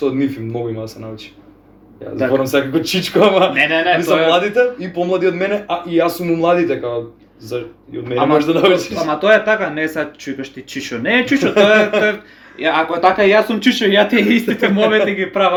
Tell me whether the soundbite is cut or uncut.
uncut